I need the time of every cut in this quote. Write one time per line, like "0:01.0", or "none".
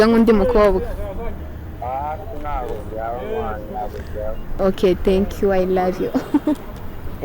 0:04.5